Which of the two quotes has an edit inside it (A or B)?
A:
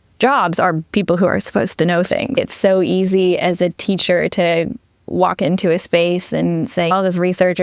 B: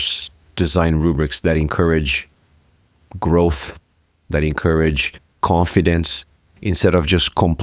A